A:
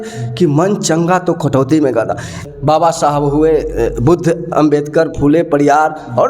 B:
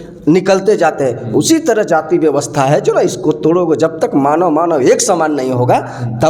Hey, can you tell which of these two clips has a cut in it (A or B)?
A